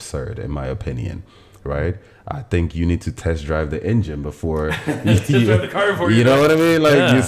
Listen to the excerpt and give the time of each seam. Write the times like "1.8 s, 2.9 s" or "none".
none